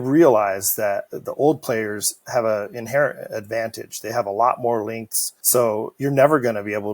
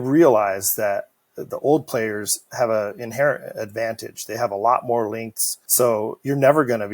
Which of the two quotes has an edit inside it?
first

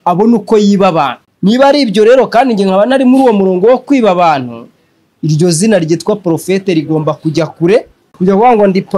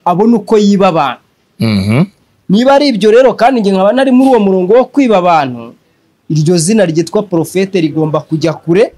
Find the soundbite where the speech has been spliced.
first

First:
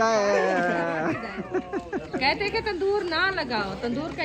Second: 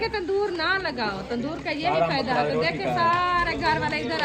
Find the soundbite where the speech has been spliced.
first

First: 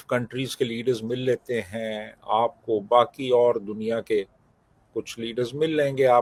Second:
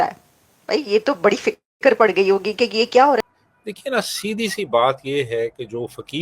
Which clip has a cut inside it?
second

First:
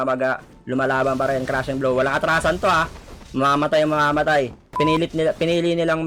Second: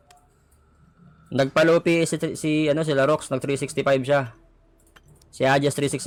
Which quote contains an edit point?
first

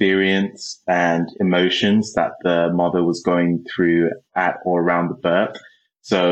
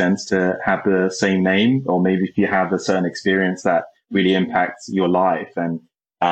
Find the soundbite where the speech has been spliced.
first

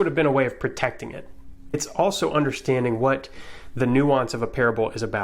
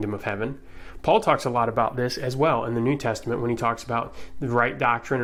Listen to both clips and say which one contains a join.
first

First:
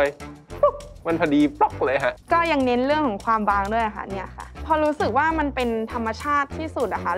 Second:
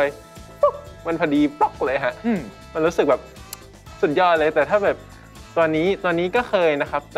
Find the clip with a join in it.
first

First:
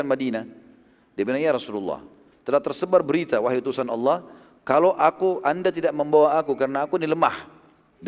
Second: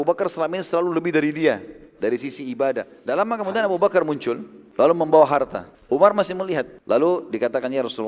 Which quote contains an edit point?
second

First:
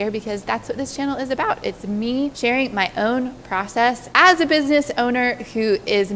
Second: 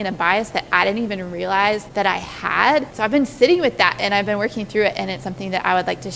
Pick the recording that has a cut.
second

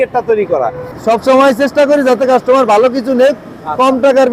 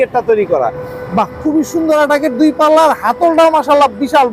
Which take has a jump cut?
first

